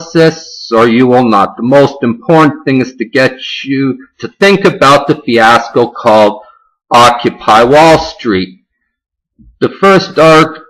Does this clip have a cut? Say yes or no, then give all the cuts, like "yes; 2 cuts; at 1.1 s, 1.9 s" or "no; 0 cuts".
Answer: no; 0 cuts